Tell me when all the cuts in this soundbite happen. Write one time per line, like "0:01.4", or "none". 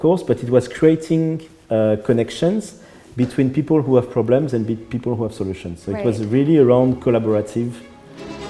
none